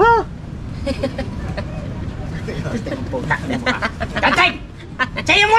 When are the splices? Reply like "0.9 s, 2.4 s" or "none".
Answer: none